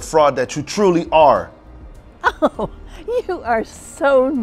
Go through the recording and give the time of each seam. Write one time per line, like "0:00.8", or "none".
none